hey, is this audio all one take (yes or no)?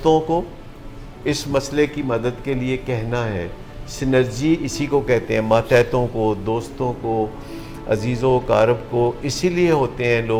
yes